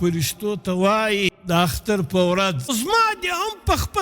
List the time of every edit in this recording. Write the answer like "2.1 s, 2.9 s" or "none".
1.4 s, 2.7 s

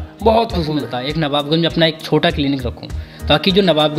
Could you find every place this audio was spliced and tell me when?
1.0 s

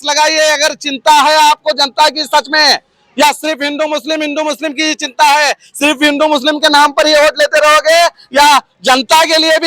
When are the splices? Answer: none

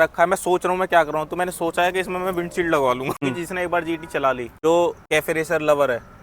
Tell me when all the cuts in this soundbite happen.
3.2 s, 4.5 s, 5.0 s

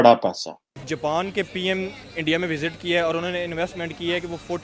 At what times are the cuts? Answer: 1.0 s

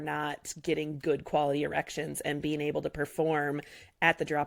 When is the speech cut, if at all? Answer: none

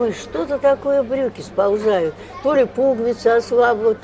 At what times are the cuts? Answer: none

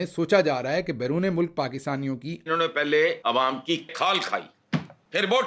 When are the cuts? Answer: 2.5 s, 3.9 s

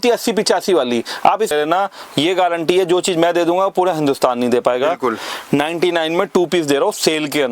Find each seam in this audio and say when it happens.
1.5 s

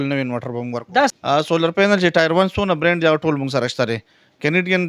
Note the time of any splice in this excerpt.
1.1 s

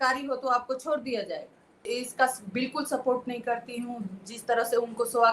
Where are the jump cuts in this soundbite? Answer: 1.9 s

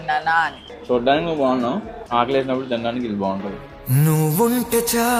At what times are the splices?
2.0 s

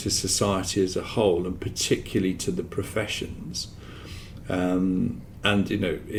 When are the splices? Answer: none

